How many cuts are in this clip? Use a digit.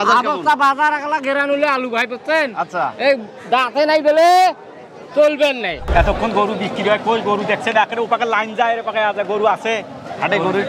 1